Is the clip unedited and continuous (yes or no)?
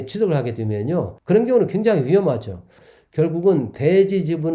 no